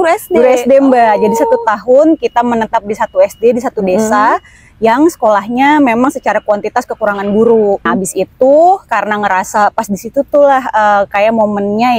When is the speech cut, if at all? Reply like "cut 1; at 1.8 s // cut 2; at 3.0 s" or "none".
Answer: cut 1; at 7.9 s